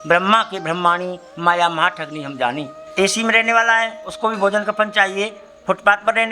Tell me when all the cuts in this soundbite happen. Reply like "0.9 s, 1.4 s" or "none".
2.7 s